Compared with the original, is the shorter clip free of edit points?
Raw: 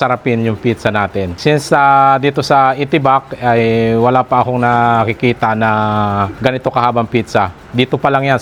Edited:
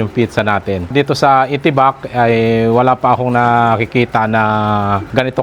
no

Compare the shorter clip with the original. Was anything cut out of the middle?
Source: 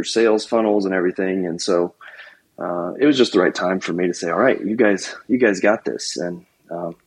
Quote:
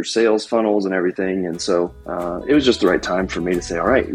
yes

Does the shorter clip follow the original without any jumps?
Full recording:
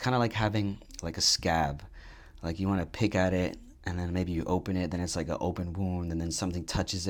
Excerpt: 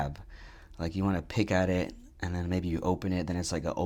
yes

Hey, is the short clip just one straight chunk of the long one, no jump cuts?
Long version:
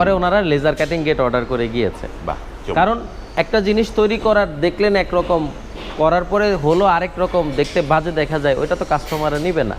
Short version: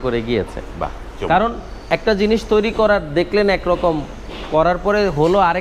yes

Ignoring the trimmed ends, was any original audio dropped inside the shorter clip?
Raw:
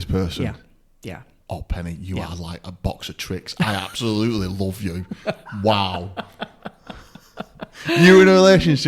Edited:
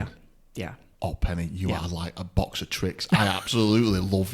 no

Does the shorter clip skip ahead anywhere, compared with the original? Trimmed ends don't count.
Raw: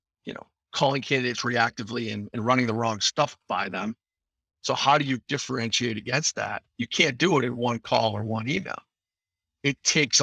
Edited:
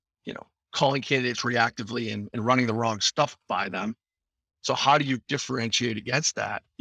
no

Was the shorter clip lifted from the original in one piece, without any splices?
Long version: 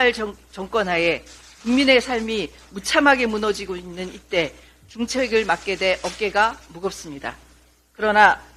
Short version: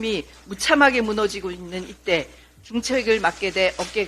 yes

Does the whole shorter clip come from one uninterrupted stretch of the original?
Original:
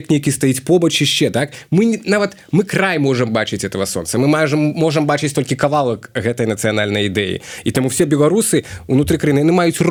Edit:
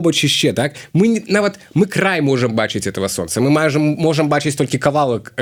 yes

